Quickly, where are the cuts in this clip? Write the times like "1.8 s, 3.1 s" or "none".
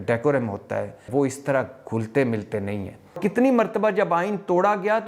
1.0 s, 3.2 s